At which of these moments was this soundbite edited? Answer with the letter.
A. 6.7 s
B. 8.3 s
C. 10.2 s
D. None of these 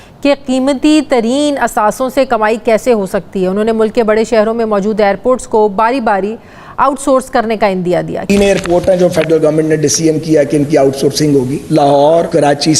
B